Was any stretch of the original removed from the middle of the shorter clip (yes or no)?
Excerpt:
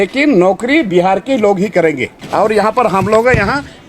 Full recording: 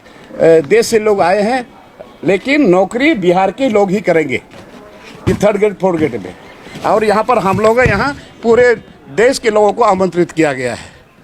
yes